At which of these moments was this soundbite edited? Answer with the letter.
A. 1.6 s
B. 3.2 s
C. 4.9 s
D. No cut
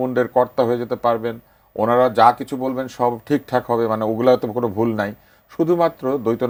D